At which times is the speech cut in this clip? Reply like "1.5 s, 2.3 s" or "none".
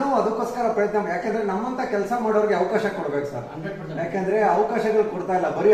none

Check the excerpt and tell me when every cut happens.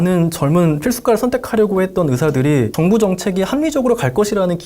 2.7 s

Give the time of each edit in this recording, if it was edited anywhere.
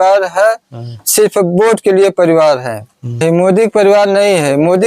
3.2 s

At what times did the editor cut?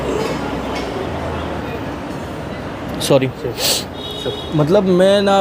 1.7 s

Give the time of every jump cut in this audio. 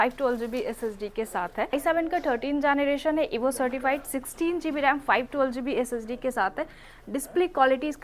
1.7 s

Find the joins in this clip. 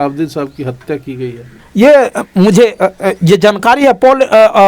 none

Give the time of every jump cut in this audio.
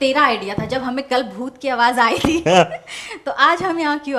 none

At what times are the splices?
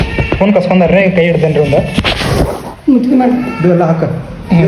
none

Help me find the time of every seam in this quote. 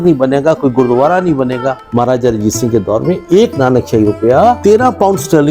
1.8 s, 4.6 s

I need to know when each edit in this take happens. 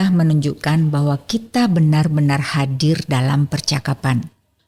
none

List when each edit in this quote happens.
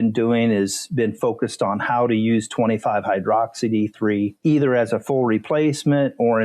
4.4 s

